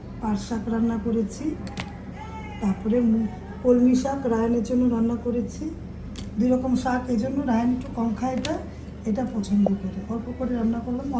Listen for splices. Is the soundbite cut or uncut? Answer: uncut